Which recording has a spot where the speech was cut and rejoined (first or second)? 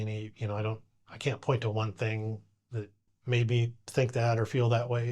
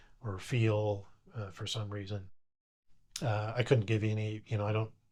first